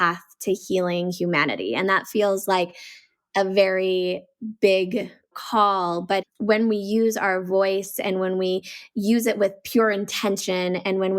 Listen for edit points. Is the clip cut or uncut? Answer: cut